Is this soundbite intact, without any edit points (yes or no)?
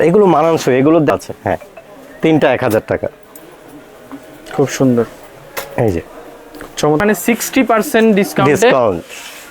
no